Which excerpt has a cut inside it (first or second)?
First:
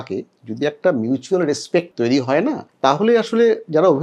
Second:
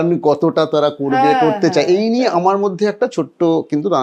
first